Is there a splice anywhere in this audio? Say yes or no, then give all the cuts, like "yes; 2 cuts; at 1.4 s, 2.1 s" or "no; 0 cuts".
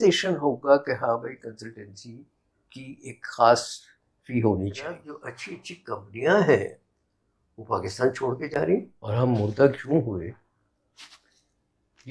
yes; 2 cuts; at 5.2 s, 9.0 s